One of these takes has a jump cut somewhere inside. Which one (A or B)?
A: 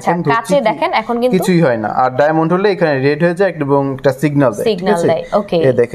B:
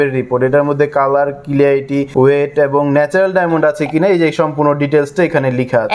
B